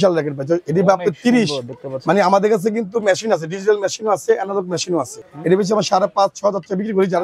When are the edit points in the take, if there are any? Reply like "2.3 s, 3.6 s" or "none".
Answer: 5.2 s